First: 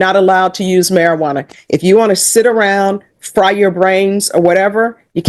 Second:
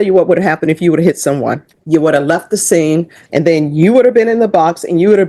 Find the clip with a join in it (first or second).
second